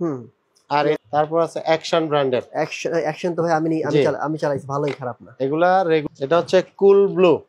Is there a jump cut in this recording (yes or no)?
yes